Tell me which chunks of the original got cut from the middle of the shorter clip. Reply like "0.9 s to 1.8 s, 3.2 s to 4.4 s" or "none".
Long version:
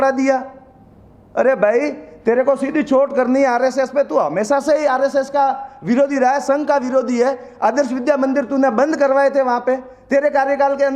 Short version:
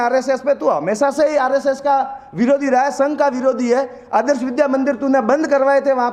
none